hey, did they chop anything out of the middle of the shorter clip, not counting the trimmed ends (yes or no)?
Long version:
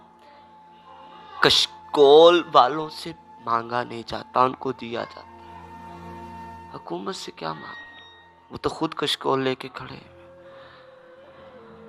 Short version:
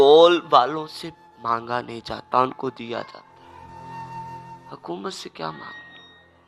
no